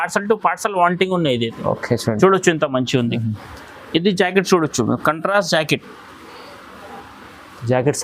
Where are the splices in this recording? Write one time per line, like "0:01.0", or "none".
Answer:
none